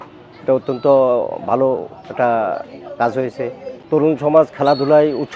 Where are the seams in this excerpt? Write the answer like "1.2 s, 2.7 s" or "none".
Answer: 3.7 s